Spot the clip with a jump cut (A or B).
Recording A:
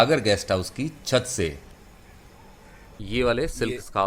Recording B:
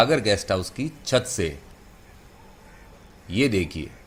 A